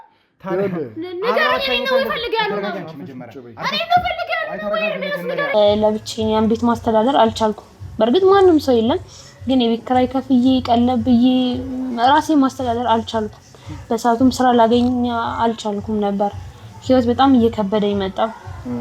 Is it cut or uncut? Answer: cut